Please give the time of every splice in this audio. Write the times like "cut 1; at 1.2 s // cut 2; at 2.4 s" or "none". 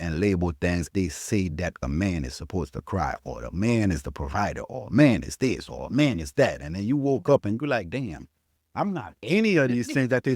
cut 1; at 0.9 s // cut 2; at 1.8 s